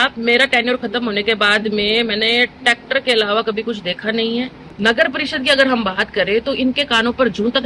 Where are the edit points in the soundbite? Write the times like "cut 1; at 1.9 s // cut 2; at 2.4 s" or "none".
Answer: cut 1; at 4.6 s